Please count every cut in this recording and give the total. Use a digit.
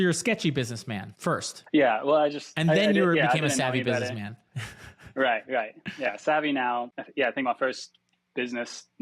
1